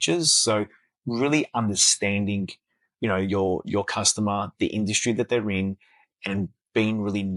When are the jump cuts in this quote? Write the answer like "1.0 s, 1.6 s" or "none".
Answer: none